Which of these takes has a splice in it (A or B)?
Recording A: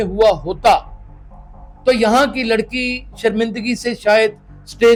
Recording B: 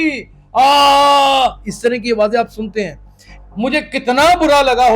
B